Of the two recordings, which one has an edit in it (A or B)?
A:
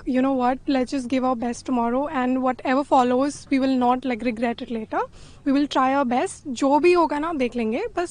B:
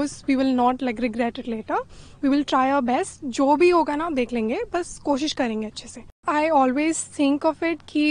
B